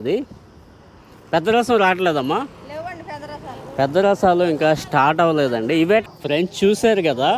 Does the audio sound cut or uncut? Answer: cut